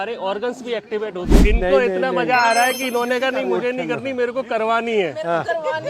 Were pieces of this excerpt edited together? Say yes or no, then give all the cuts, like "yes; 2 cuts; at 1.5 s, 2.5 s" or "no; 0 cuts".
yes; 1 cut; at 1.6 s